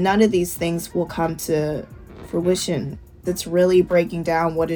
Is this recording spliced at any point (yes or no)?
yes